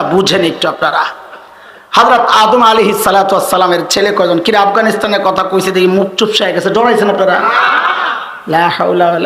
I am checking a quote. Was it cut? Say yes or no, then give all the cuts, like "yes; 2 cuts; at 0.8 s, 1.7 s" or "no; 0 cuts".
no; 0 cuts